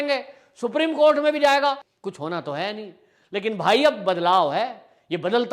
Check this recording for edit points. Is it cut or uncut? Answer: cut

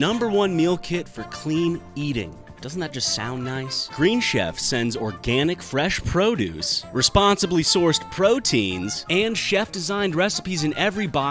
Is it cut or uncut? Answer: uncut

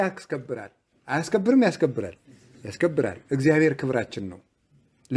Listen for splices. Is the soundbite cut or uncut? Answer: uncut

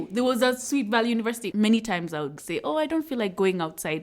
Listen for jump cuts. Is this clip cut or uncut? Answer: cut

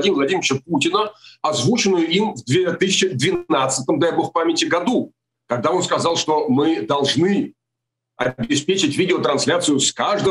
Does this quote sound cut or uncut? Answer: uncut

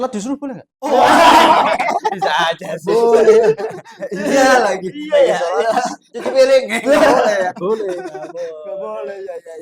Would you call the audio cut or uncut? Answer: uncut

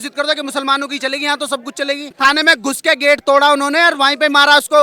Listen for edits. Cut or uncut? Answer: cut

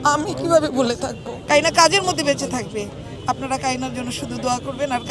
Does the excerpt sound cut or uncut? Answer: cut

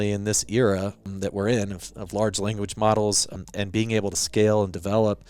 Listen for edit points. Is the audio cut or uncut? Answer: cut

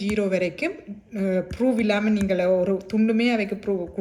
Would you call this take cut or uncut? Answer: uncut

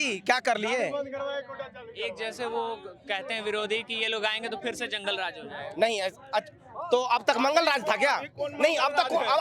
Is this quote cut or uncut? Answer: uncut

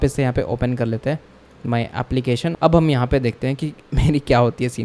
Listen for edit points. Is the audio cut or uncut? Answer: cut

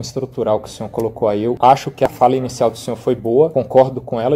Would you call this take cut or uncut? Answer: uncut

